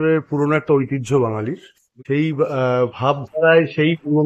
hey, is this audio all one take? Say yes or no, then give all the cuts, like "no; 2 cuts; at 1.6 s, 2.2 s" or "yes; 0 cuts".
no; 1 cut; at 2.0 s